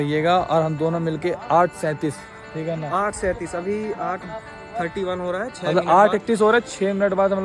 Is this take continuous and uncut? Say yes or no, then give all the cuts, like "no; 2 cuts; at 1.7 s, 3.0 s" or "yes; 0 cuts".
yes; 0 cuts